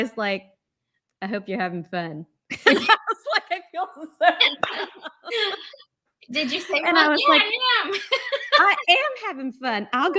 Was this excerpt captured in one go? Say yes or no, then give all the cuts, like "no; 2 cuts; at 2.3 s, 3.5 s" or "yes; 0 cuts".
yes; 0 cuts